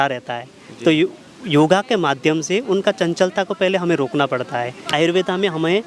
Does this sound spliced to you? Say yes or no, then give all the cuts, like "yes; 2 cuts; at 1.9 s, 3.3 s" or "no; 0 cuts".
yes; 1 cut; at 4.9 s